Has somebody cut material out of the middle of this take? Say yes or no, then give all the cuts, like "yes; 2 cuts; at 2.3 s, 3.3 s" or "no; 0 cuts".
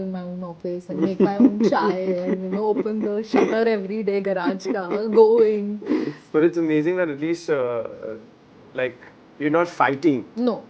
yes; 1 cut; at 6.2 s